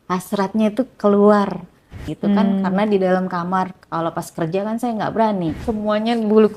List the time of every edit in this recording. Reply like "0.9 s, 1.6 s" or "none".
2.1 s, 5.6 s